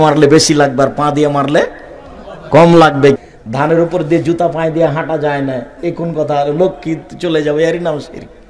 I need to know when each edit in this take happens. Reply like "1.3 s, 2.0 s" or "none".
3.2 s